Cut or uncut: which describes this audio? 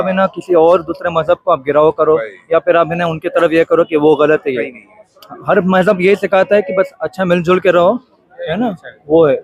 uncut